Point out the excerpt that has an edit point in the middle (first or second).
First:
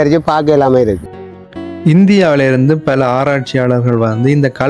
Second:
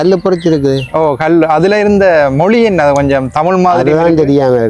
first